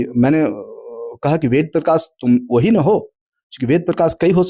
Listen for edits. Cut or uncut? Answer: uncut